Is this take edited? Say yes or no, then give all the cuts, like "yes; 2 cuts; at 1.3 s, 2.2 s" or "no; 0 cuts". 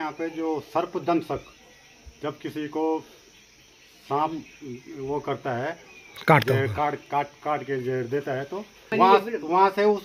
yes; 1 cut; at 8.9 s